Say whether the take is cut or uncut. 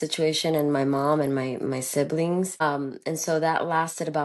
cut